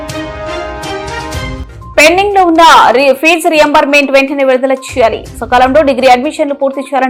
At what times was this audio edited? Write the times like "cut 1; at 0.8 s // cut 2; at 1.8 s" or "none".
none

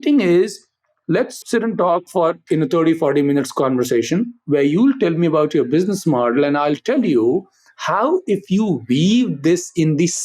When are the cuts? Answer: cut 1; at 1.4 s

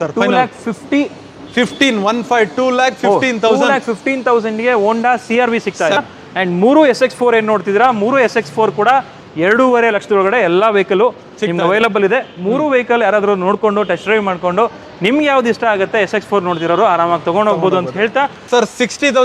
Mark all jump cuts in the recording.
cut 1; at 6.0 s // cut 2; at 18.4 s

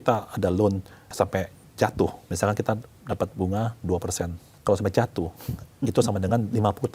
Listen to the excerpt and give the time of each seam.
cut 1; at 1.0 s // cut 2; at 2.2 s // cut 3; at 4.4 s

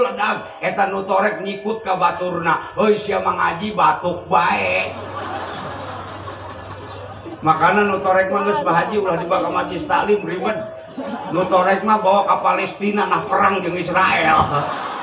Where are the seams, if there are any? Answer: none

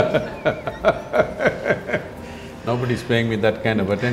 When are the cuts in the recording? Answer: none

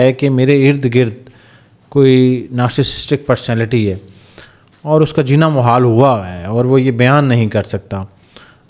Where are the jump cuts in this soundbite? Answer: none

